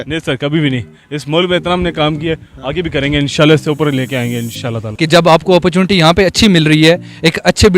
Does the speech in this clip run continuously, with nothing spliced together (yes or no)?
no